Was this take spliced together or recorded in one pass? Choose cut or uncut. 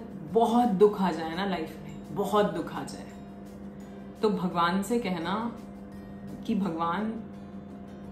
uncut